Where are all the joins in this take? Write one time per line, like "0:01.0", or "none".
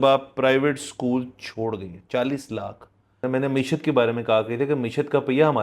0:03.1